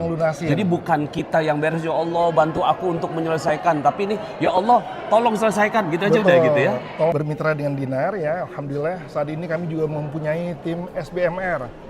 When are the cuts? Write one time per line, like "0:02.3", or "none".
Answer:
0:07.1